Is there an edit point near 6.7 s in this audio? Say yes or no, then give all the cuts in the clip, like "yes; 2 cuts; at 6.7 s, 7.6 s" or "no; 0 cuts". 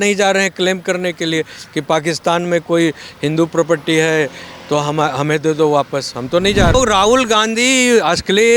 yes; 1 cut; at 6.7 s